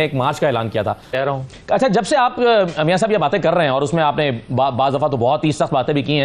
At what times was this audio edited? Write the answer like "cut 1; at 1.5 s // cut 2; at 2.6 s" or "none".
cut 1; at 1.1 s